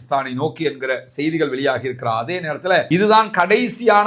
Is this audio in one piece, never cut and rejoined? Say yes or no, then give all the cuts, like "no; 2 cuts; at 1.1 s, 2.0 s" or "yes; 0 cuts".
no; 1 cut; at 2.9 s